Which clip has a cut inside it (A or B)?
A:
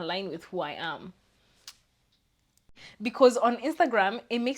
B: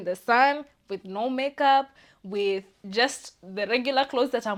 A